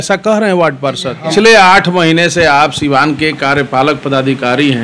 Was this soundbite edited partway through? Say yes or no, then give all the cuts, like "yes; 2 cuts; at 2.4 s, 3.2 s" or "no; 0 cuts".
yes; 1 cut; at 1.3 s